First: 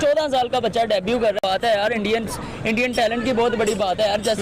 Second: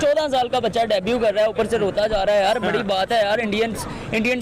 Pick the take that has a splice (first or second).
first